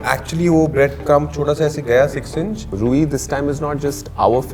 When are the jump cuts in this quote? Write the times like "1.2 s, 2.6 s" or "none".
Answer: 2.7 s